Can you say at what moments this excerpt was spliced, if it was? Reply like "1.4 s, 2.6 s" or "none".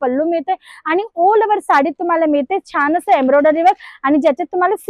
none